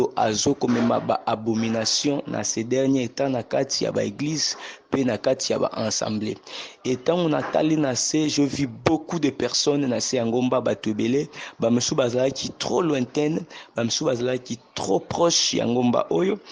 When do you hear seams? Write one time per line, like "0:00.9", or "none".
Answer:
none